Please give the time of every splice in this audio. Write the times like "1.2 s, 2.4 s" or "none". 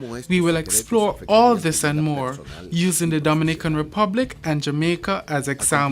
3.0 s